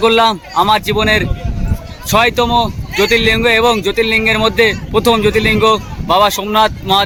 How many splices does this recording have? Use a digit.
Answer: 0